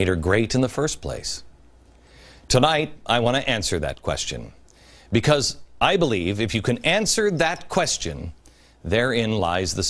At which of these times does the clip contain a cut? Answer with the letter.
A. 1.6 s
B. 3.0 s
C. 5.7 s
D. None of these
B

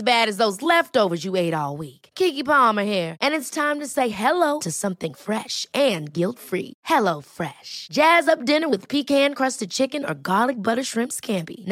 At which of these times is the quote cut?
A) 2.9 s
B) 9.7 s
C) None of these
C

